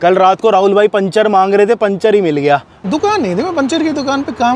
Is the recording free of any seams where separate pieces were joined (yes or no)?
no